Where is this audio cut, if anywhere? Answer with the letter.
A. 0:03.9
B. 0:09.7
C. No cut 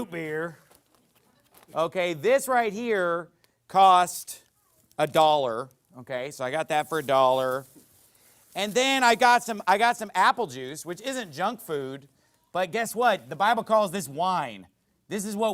C